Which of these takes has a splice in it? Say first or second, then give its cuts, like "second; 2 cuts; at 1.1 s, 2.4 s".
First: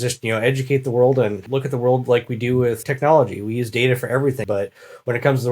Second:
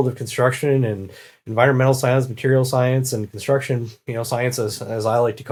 first; 3 cuts; at 1.4 s, 2.9 s, 4.4 s